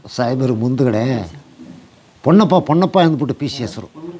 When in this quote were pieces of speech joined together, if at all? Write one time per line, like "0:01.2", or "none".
none